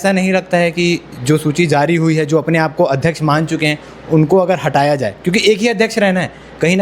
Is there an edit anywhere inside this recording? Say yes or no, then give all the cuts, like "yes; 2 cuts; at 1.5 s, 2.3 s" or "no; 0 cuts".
no; 0 cuts